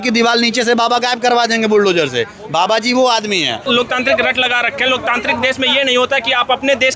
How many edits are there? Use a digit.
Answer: 1